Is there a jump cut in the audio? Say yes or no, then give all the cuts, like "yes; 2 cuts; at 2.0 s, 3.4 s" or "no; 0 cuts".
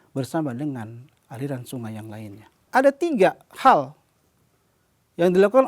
yes; 1 cut; at 2.6 s